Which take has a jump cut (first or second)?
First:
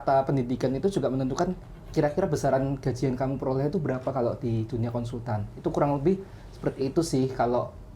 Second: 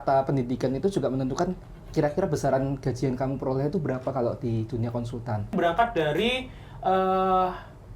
second